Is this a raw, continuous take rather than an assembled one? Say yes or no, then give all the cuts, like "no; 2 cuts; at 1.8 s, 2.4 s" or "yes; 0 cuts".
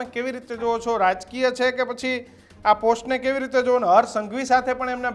yes; 0 cuts